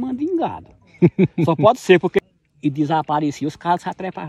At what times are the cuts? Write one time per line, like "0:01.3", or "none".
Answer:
0:02.2